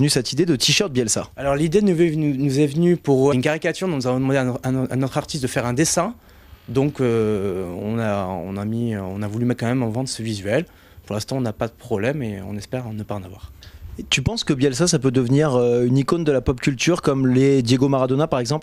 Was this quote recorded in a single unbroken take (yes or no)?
yes